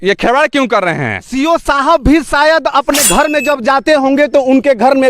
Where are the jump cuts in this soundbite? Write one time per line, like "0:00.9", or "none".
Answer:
0:01.2